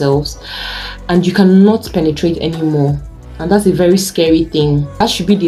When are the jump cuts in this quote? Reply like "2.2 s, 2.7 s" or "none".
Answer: none